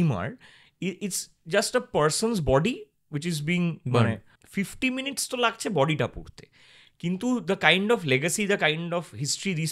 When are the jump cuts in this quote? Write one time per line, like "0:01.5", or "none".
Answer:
0:04.3